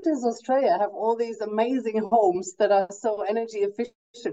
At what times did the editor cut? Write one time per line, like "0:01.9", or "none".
none